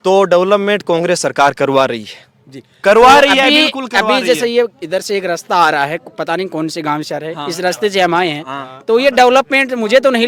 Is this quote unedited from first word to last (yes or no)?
yes